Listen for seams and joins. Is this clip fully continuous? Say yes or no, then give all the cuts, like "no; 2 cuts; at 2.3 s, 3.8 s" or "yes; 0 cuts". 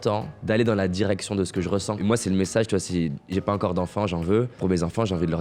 no; 2 cuts; at 2.0 s, 4.5 s